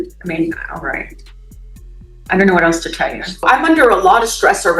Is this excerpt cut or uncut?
cut